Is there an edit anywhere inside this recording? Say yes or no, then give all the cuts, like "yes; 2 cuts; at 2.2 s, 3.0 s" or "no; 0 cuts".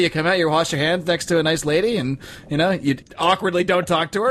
yes; 1 cut; at 3.0 s